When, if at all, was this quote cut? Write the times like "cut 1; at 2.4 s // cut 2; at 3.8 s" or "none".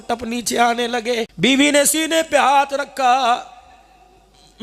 cut 1; at 1.3 s